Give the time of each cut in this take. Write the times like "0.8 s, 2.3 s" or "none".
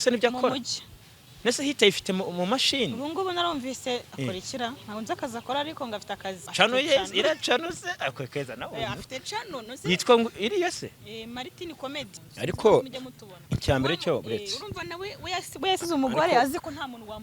6.4 s, 12.1 s